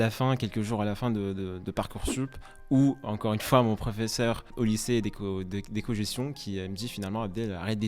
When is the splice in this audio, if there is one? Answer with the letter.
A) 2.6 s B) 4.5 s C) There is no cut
B